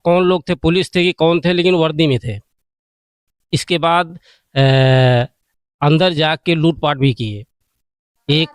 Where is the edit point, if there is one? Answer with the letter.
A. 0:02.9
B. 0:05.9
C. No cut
C